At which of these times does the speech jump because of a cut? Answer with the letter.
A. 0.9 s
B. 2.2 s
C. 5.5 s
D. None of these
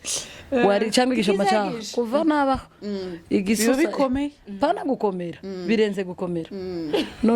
D